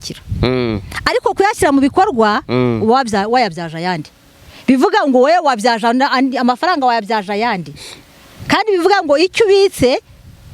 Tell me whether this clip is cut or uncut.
uncut